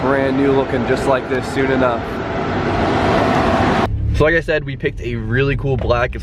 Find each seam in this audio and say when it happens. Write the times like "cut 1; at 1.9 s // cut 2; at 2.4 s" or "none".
cut 1; at 2.6 s